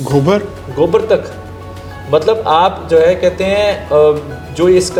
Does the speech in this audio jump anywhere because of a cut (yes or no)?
no